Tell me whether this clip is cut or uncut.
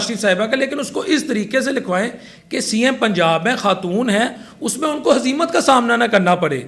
uncut